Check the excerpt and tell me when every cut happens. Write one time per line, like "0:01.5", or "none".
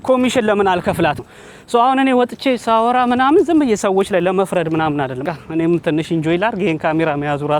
0:01.2
0:05.2